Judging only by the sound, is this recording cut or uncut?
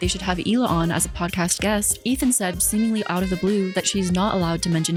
uncut